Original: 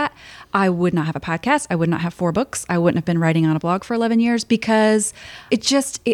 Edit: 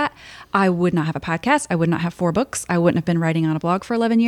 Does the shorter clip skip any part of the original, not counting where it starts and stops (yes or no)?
no